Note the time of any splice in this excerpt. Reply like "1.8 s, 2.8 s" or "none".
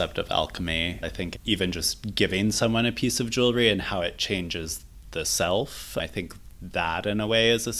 0.9 s